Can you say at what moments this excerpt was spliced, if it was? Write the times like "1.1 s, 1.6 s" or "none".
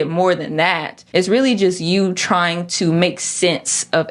0.9 s